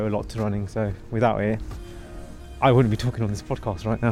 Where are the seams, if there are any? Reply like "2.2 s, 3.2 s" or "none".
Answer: none